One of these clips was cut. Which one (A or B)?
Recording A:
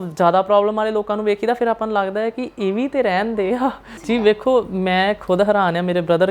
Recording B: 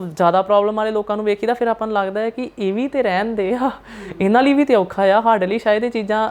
A